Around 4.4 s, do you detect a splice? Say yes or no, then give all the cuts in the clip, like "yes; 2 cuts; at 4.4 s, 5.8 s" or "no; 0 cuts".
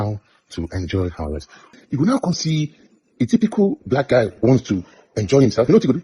no; 1 cut; at 1.6 s